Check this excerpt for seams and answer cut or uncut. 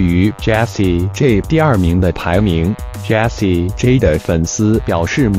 uncut